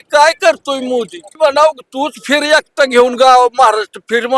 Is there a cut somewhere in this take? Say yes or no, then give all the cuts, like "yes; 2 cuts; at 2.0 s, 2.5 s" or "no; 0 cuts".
yes; 1 cut; at 1.3 s